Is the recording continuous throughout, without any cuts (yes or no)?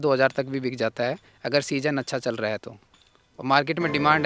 yes